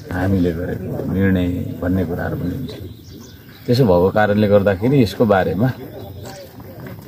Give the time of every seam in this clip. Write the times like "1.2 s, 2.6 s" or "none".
none